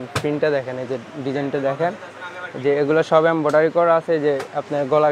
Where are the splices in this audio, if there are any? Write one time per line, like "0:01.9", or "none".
none